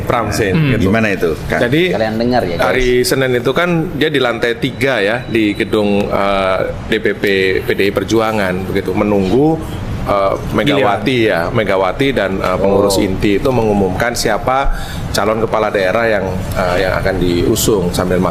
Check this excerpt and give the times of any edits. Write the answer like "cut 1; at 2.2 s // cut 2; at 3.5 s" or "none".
none